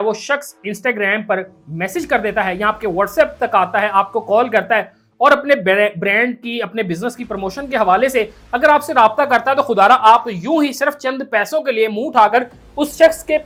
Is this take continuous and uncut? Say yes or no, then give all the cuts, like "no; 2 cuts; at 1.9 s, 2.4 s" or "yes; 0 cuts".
yes; 0 cuts